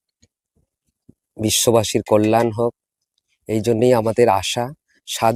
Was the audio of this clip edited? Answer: no; 0 cuts

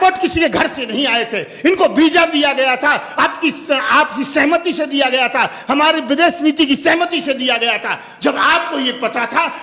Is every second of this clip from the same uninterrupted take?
yes; 0 cuts

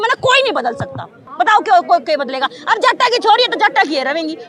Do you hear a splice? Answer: no; 0 cuts

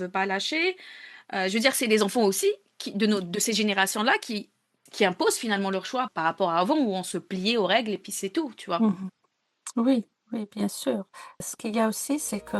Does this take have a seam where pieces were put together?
yes; 1 cut; at 11.4 s

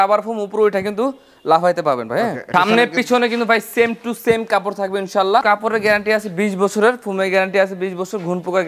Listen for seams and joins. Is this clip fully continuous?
no; 2 cuts; at 2.4 s, 5.4 s

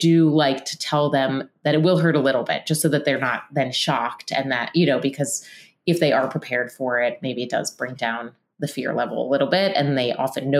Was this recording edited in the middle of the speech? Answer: no; 0 cuts

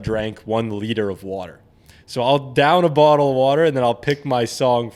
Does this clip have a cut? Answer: no; 0 cuts

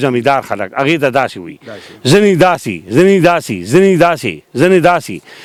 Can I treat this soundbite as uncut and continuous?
yes; 0 cuts

